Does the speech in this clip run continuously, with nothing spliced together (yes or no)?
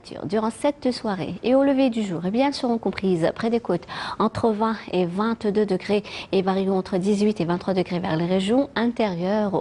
yes